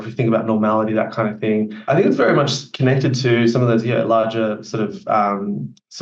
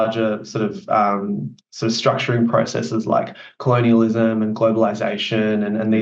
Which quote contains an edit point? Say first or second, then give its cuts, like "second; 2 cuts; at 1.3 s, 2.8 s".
first; 1 cut; at 1.8 s